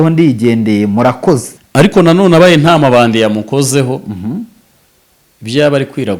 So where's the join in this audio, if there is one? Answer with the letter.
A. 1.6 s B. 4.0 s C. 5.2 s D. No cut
A